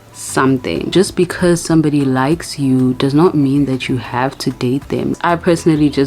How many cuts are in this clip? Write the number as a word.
two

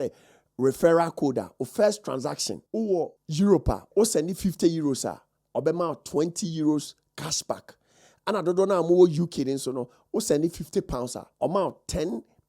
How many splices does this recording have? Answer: one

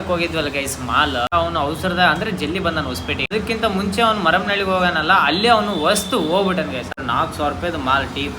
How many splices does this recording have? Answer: three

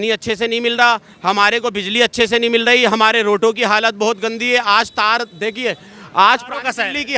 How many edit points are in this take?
zero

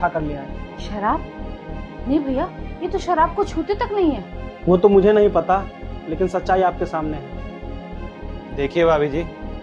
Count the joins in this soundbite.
zero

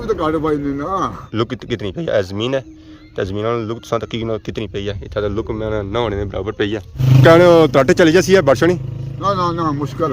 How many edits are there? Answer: two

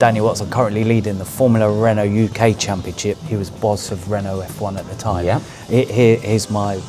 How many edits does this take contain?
zero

